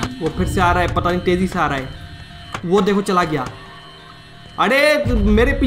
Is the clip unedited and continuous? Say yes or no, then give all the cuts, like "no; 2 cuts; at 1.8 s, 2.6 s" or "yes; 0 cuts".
yes; 0 cuts